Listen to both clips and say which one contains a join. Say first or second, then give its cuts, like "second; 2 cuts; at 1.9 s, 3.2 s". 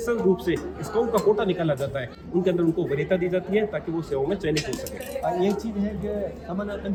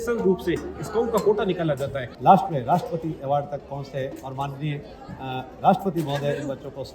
second; 1 cut; at 2.0 s